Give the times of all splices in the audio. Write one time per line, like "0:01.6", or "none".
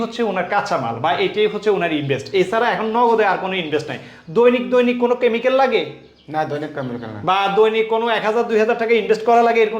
none